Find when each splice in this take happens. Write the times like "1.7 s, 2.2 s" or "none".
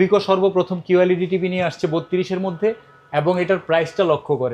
none